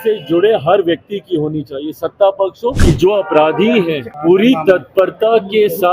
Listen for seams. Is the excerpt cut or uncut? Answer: cut